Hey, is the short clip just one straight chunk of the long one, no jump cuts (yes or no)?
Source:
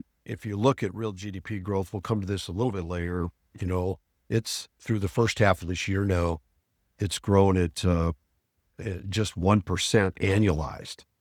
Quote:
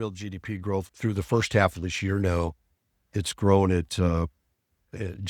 no